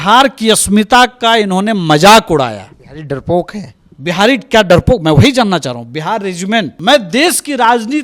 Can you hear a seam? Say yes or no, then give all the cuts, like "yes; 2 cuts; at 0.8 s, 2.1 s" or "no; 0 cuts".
yes; 1 cut; at 6.7 s